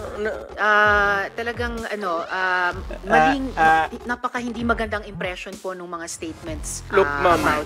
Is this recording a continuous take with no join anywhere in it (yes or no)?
no